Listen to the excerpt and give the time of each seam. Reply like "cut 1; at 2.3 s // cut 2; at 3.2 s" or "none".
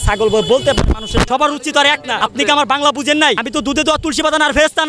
cut 1; at 1.3 s // cut 2; at 2.2 s // cut 3; at 3.4 s